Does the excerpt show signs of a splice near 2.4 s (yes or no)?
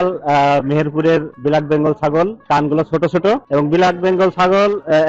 yes